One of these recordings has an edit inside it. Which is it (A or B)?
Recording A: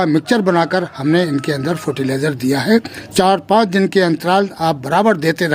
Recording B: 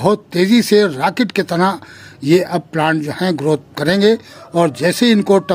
A